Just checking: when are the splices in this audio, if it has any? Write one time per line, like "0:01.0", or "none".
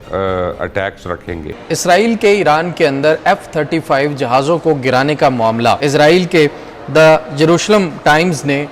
0:01.4
0:05.8